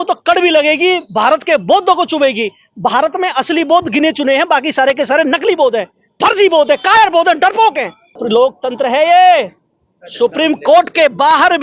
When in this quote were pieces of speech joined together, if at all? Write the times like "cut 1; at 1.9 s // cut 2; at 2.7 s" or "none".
cut 1; at 8.2 s